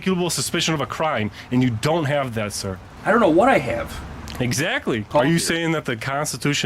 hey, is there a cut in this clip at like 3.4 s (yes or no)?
no